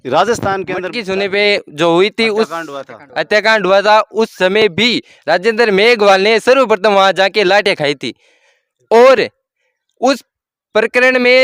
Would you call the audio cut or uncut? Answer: cut